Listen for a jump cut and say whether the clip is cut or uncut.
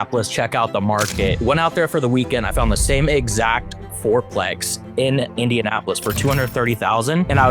uncut